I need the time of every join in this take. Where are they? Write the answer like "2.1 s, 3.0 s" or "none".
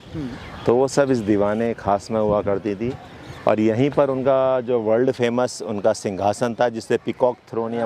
none

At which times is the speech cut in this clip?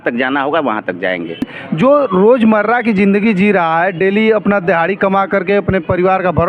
1.6 s

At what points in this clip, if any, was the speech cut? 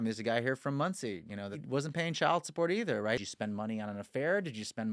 1.6 s, 3.2 s

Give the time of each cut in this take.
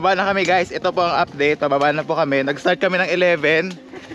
none

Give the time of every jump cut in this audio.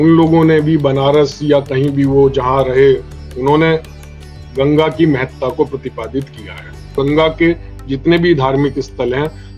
6.9 s

